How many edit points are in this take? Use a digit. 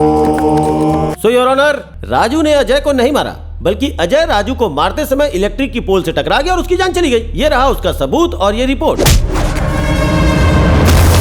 2